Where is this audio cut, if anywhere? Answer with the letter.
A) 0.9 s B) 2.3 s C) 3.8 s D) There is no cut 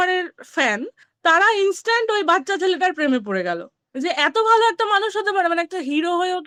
D